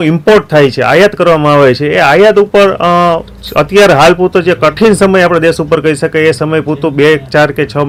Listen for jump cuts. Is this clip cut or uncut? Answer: uncut